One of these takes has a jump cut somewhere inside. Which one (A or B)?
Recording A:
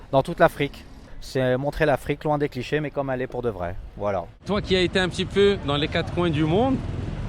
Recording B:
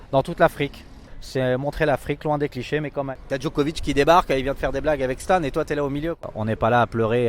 B